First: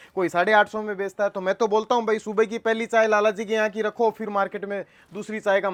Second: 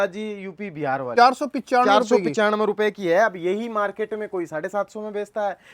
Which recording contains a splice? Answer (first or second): second